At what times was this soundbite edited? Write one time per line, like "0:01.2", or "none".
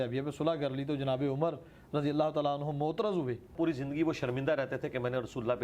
0:03.5